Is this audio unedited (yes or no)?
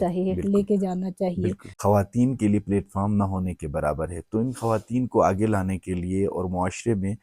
no